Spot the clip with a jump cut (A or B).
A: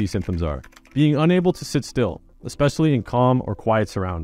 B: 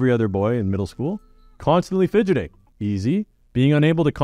B